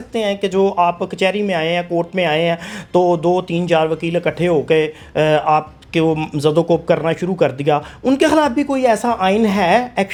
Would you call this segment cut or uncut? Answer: uncut